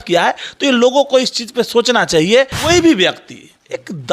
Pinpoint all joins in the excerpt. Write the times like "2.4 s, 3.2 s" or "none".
2.6 s